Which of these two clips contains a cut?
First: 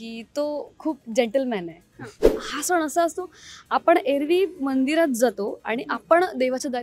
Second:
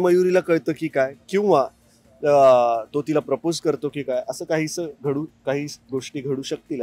first; 1 cut; at 2.5 s

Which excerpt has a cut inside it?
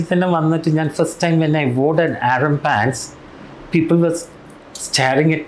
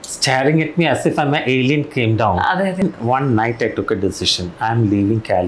second; 1 cut; at 2.8 s

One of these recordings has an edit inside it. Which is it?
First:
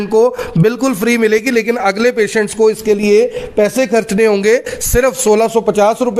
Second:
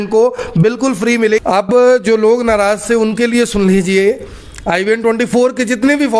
second; 1 cut; at 1.4 s

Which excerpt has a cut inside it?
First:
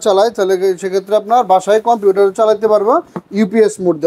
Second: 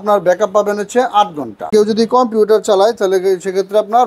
second; 1 cut; at 1.7 s

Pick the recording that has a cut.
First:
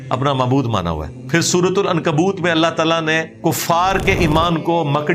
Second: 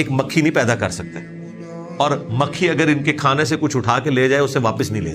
first; 2 cuts; at 1.1 s, 3.3 s

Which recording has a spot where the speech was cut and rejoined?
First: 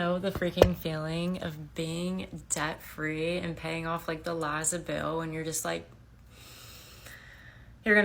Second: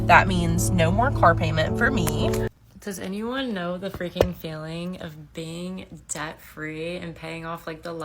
second; 1 cut; at 2.5 s

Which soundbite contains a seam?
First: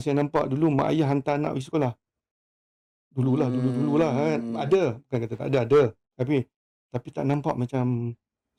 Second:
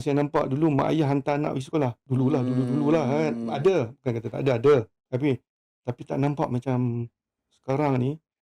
second; 1 cut; at 2.0 s

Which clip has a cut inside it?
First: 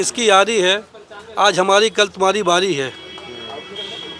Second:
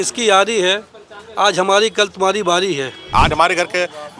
second; 1 cut; at 3.1 s

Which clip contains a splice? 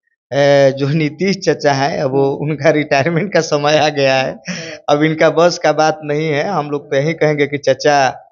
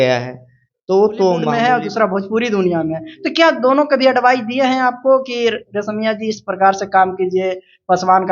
second; 1 cut; at 1.5 s

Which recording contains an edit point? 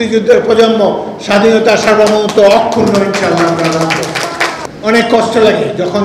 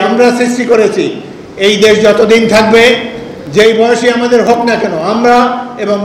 first; 1 cut; at 4.7 s

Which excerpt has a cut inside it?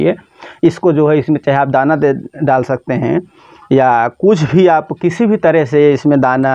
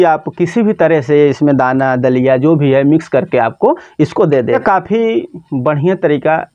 second; 1 cut; at 4.6 s

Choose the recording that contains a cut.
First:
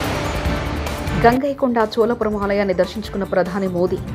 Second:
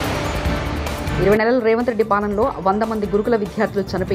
first; 1 cut; at 1.1 s

